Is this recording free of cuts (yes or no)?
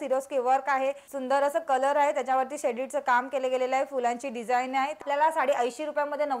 no